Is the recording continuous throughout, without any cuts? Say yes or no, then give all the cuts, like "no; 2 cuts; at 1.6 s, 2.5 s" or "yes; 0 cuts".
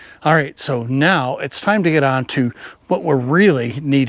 yes; 0 cuts